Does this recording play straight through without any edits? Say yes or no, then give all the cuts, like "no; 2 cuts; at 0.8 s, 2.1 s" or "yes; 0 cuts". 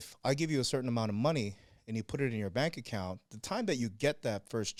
yes; 0 cuts